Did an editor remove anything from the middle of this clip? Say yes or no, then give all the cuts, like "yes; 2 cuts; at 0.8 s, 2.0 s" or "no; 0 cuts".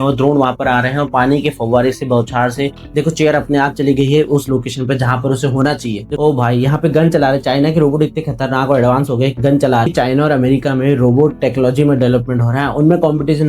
yes; 3 cuts; at 2.7 s, 6.1 s, 9.9 s